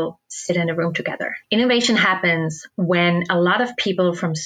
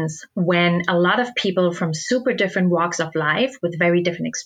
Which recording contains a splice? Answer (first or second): first